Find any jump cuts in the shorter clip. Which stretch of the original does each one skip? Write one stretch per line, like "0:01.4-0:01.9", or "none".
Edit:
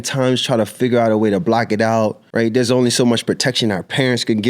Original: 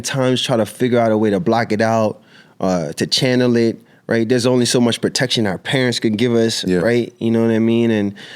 0:02.2-0:04.0

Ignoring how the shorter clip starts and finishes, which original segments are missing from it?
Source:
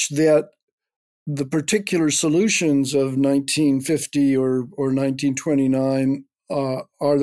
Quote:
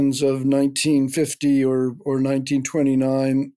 none

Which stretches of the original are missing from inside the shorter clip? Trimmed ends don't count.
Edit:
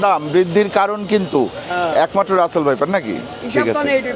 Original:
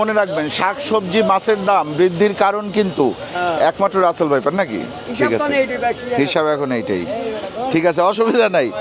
none

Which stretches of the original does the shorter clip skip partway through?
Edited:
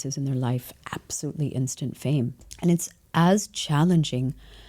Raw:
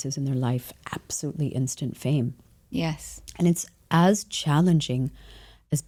0:02.4-0:03.2

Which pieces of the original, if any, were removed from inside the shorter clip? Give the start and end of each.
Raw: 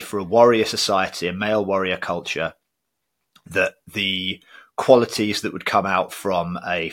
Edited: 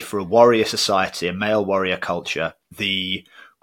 0:02.7-0:03.9

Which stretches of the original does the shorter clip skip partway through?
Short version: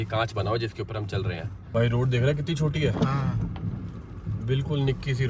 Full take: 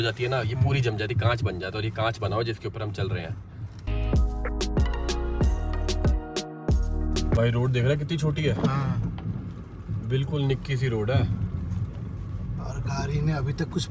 0:03.6-0:07.4

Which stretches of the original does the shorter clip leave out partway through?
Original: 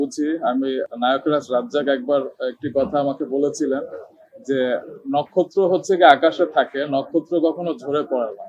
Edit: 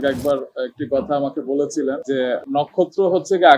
0:04.2-0:04.9

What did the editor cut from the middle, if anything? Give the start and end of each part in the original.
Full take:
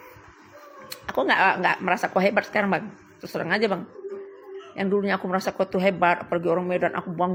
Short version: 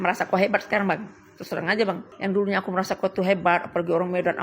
0:03.9-0:04.6

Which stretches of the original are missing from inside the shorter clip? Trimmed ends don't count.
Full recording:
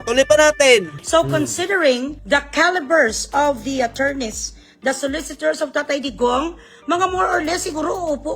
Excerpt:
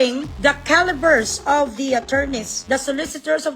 0:04.4-0:04.7

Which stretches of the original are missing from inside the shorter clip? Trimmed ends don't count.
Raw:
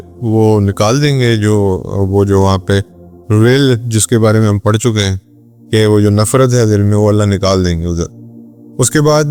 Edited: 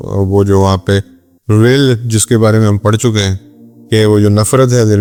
none

